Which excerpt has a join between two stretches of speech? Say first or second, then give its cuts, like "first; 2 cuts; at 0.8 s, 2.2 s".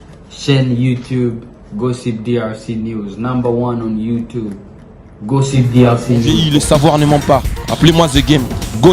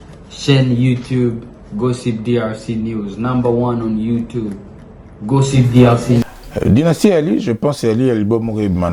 second; 1 cut; at 6.2 s